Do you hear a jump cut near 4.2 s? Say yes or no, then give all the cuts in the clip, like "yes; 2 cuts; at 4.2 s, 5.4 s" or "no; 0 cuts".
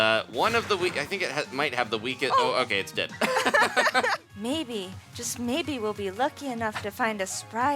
yes; 1 cut; at 4.2 s